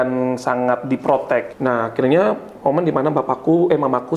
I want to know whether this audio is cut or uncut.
cut